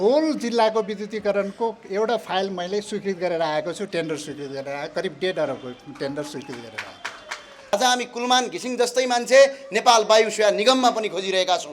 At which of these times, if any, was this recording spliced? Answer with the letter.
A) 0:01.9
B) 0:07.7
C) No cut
B